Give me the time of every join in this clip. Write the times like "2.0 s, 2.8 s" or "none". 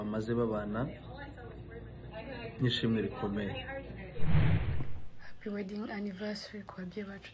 4.2 s, 4.8 s